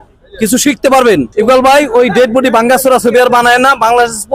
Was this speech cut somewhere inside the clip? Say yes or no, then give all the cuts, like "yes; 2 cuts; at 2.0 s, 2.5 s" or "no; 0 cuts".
yes; 1 cut; at 1.3 s